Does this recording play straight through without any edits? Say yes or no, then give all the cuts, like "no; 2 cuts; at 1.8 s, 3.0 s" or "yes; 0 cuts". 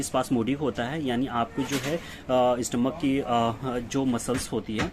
yes; 0 cuts